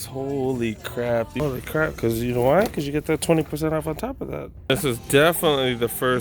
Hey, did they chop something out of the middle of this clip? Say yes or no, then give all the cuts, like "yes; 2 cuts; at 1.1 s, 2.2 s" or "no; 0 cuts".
yes; 2 cuts; at 1.4 s, 4.7 s